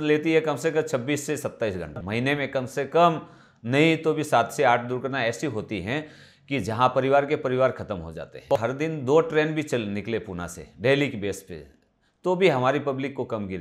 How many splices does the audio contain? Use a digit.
2